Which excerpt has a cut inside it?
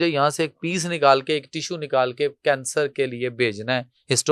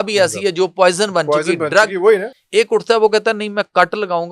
second; 1 cut; at 2.3 s

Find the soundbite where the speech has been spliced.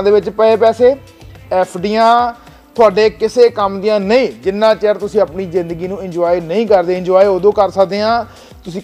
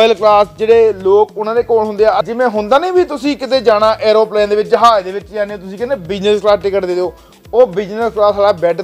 second; 1 cut; at 2.2 s

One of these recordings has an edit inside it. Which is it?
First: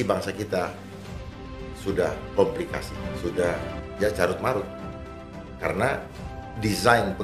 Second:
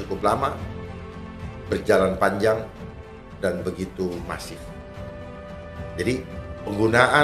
first; 2 cuts; at 3.0 s, 3.7 s

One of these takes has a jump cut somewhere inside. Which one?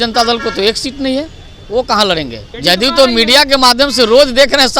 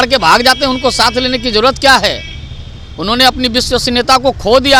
first; 1 cut; at 2.4 s

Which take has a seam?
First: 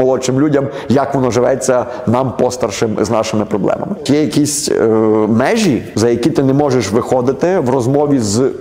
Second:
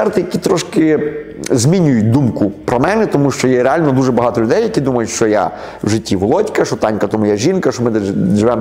first; 2 cuts; at 4.0 s, 5.9 s

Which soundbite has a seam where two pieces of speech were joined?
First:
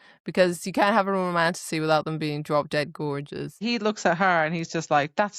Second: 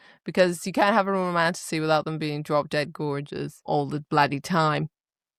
first; 1 cut; at 3.6 s

